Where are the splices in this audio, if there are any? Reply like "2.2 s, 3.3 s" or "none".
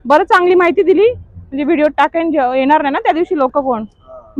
none